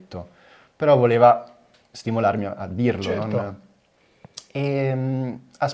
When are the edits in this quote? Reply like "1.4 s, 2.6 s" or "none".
none